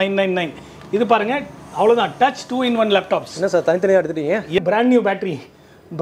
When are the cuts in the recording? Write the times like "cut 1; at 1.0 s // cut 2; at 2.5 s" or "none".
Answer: cut 1; at 4.6 s